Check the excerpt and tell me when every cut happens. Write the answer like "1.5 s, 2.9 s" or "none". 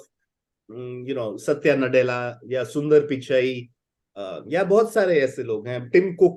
none

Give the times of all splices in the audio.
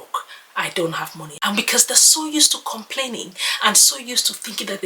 1.2 s

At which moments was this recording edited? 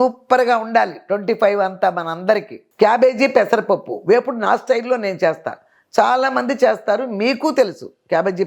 2.6 s

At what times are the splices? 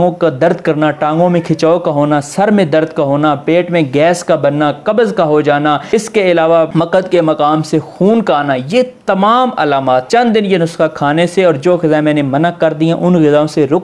5.8 s, 6.7 s, 10.1 s

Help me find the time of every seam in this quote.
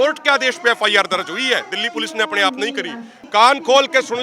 3.1 s

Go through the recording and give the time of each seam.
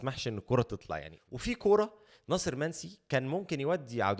1.2 s

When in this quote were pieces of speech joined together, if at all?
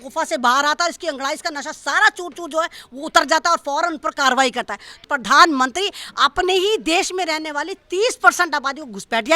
4.9 s

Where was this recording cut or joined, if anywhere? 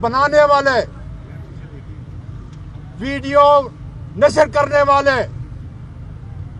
none

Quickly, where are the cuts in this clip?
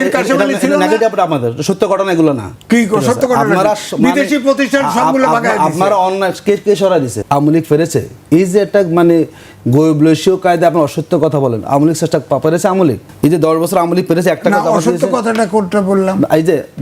2.5 s, 7.2 s, 13.1 s

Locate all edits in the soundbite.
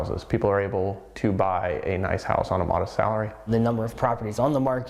3.5 s

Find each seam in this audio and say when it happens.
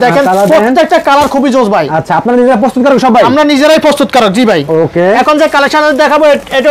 none

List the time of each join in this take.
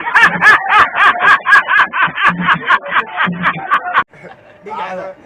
2.8 s, 4.1 s

